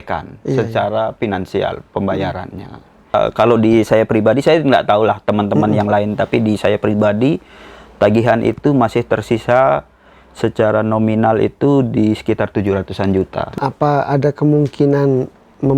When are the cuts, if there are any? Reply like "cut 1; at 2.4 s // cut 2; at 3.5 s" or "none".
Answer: cut 1; at 3.1 s // cut 2; at 13.5 s